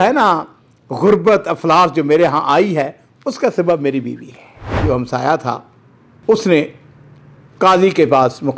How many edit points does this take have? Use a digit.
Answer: 1